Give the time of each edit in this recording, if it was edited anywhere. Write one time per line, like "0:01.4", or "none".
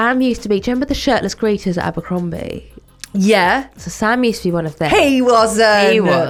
none